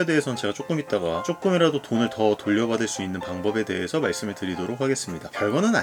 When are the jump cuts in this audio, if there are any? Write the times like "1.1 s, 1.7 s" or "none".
none